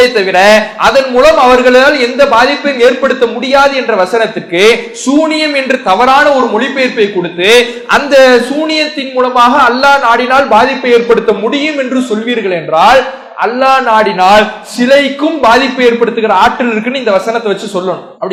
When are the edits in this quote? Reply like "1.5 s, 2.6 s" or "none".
none